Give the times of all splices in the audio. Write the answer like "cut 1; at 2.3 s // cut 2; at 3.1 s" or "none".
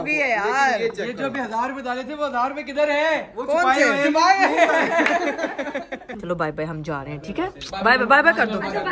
cut 1; at 6.1 s

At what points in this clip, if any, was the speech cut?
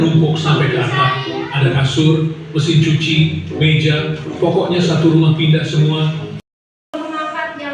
cut 1; at 6.5 s

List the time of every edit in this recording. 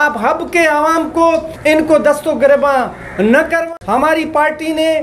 cut 1; at 1.5 s // cut 2; at 3.6 s

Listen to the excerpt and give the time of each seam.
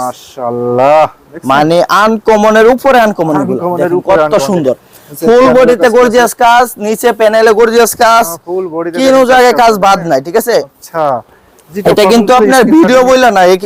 none

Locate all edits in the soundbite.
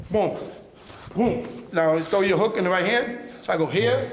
cut 1; at 1.6 s

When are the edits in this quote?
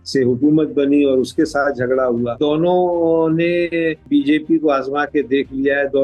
cut 1; at 2.3 s // cut 2; at 4.0 s

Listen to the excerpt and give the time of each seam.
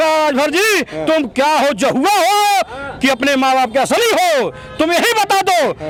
none

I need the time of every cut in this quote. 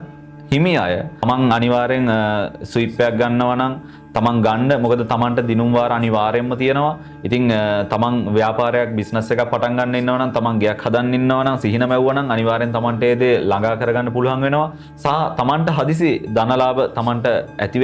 none

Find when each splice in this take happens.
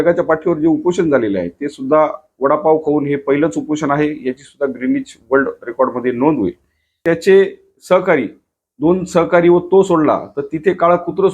cut 1; at 7.0 s

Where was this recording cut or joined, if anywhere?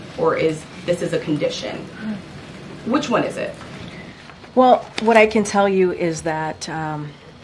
none

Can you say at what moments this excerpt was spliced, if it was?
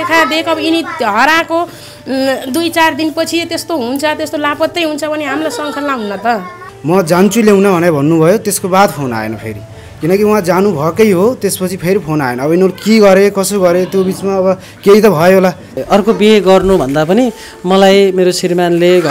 cut 1; at 6.7 s // cut 2; at 15.7 s

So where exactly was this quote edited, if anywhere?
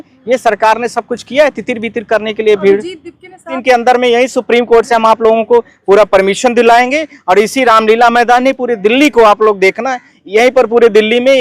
cut 1; at 3.5 s

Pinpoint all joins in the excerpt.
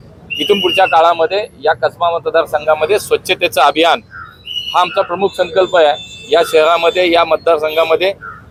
none

